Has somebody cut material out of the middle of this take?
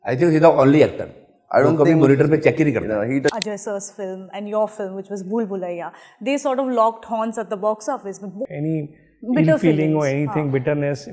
yes; 2 cuts; at 3.3 s, 8.4 s

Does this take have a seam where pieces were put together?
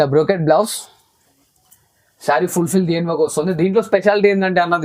no; 0 cuts

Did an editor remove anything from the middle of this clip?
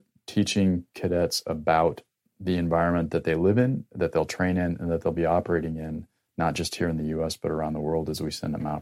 no; 0 cuts

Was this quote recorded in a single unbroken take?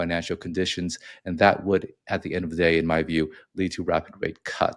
yes; 0 cuts

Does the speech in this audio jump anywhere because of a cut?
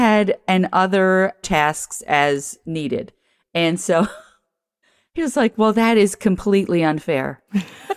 no; 0 cuts

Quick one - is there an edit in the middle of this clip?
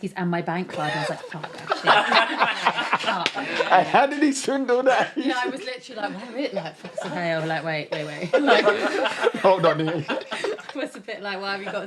no; 0 cuts

